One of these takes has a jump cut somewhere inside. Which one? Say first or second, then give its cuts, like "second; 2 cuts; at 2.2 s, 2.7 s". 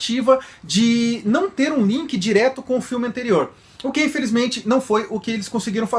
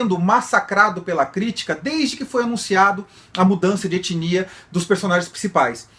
second; 1 cut; at 4.8 s